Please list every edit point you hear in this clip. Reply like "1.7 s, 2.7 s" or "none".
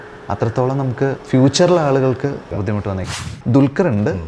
1.2 s, 2.8 s